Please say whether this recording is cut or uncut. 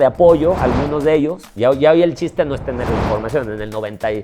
cut